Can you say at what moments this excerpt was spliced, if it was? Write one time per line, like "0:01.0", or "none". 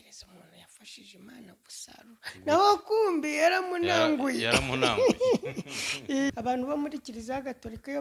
0:06.3